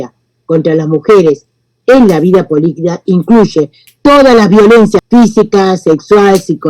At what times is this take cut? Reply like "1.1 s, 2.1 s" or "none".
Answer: 5.0 s